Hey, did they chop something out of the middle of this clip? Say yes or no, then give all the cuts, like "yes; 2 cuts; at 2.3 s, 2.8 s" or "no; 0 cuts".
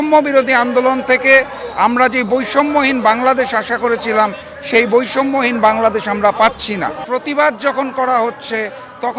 yes; 1 cut; at 7.0 s